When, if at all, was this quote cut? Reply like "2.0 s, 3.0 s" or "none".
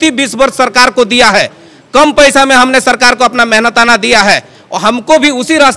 none